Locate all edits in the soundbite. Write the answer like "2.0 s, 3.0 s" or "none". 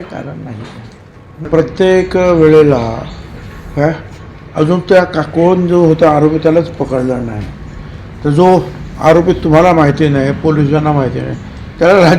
1.4 s

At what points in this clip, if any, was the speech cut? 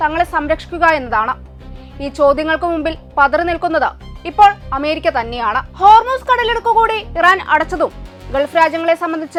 none

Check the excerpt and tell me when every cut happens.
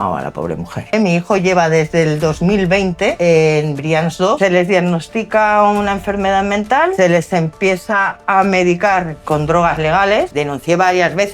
0.9 s, 3.2 s, 4.4 s, 6.9 s, 10.3 s

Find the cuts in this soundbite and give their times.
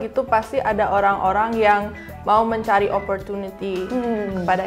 none

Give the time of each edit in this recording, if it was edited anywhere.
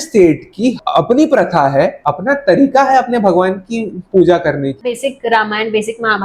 2.0 s, 5.0 s

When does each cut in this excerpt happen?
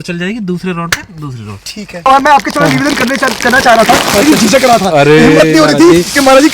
2.1 s

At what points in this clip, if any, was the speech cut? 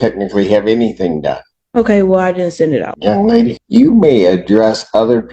2.9 s, 3.6 s

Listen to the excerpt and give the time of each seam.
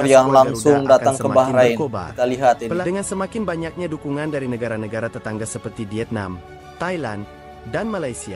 2.8 s

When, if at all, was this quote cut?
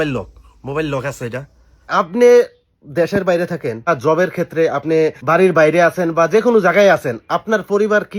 1.8 s, 3.9 s, 5.2 s

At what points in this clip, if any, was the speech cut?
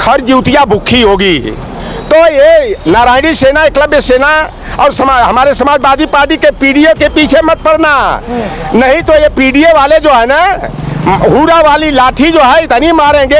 none

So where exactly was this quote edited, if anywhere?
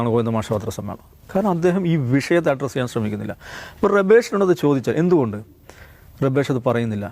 none

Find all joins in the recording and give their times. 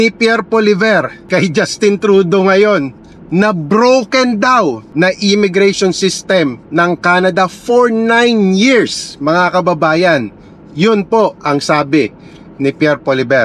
1.2 s, 4.8 s

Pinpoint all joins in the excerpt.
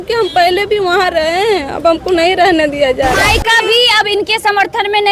3.2 s

